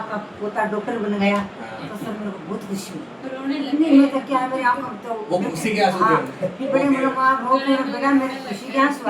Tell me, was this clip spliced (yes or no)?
no